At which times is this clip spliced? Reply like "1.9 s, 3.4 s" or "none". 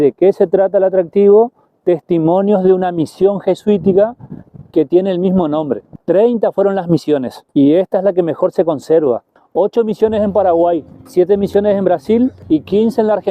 5.9 s, 7.4 s, 9.4 s, 11.0 s, 12.4 s